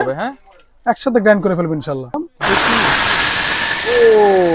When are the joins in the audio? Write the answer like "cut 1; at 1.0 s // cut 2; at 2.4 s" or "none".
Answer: cut 1; at 2.2 s